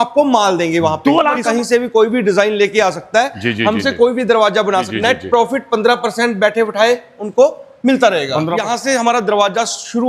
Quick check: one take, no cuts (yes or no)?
no